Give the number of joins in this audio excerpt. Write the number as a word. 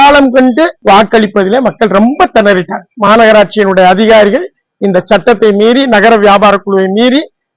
one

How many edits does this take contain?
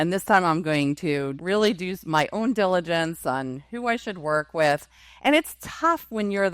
one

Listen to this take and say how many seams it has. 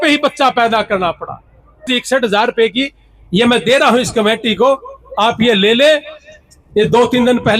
one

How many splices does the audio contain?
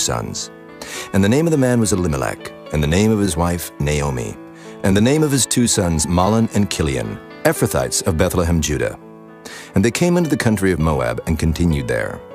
one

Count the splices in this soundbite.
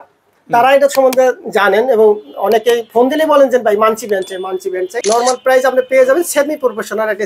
one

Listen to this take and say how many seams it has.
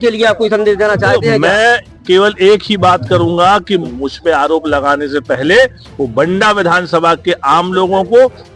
one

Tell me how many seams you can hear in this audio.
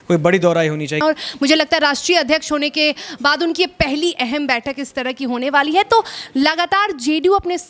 one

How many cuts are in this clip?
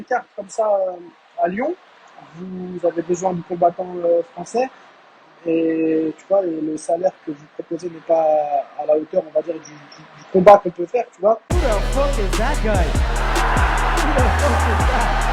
one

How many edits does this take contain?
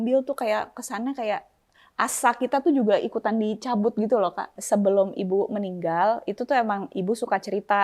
one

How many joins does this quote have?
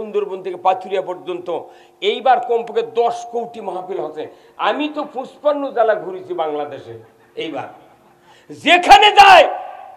zero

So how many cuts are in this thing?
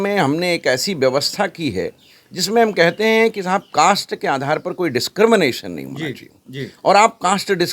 zero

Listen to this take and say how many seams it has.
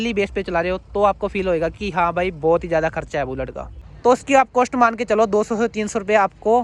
one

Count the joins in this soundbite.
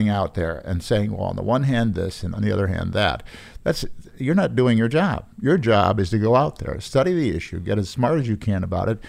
one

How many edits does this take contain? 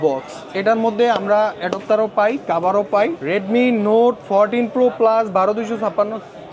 one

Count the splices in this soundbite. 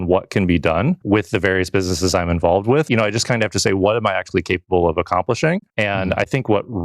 three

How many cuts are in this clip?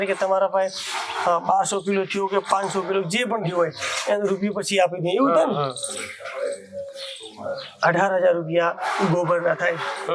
zero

